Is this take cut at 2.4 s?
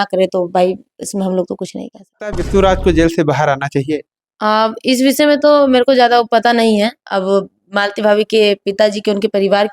yes; 1 cut; at 2.4 s

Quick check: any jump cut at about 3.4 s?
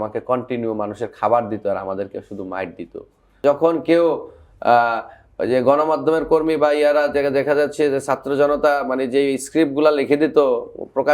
yes; 1 cut; at 3.4 s

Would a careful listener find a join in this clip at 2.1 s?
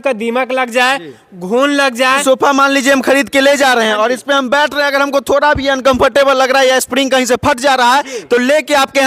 yes; 1 cut; at 2.1 s

